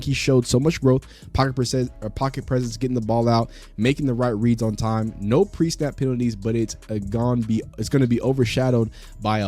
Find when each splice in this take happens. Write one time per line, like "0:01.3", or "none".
0:07.8

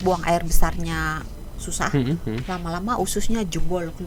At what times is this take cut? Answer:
none

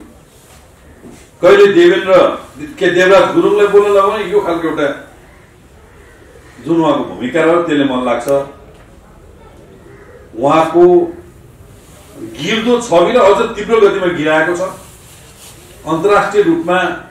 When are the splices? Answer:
none

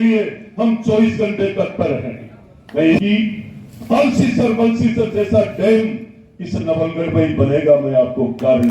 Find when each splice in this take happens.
0:03.0

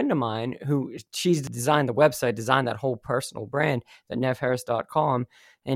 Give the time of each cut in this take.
0:01.5

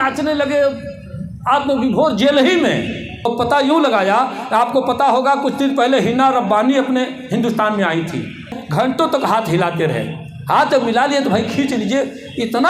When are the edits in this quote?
0:03.3
0:08.5

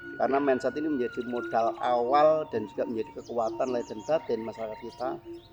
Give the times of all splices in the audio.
none

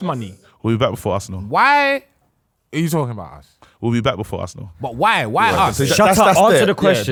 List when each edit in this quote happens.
none

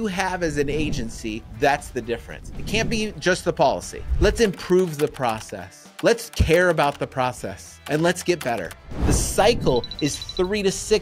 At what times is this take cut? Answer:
0:04.0
0:09.0

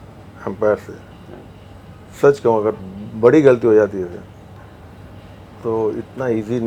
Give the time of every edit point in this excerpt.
none

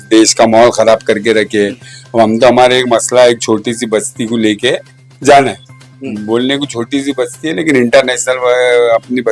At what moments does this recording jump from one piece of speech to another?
none

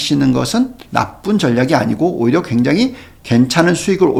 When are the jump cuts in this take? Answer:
none

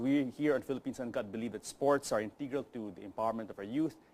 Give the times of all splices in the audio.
0:03.0

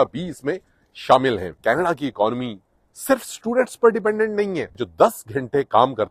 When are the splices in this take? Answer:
0:01.5
0:04.8

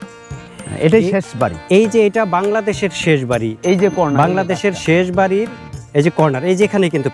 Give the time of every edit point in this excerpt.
none

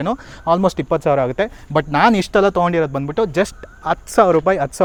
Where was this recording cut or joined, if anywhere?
none

